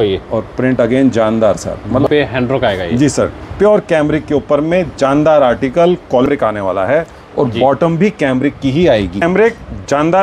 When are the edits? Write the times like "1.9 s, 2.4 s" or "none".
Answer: 2.1 s, 6.3 s, 9.2 s

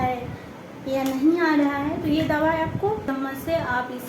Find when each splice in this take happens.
3.1 s

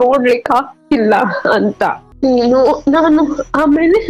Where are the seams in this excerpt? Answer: 2.0 s

